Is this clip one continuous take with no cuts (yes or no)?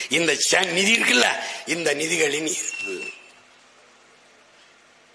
yes